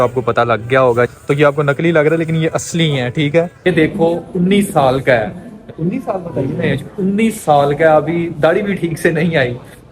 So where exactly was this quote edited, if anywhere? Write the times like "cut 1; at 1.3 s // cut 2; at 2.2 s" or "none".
cut 1; at 1.2 s // cut 2; at 3.7 s